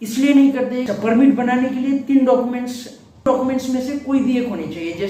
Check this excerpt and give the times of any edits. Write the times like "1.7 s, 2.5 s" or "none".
0.9 s, 3.3 s